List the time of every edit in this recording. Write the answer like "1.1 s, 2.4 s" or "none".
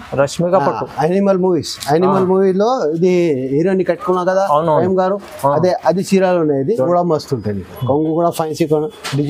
6.9 s